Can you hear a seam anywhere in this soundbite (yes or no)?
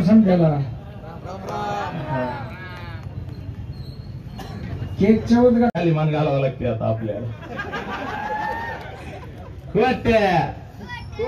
yes